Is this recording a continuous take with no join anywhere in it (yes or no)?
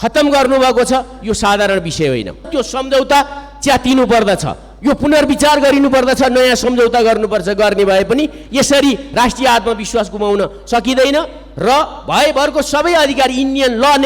no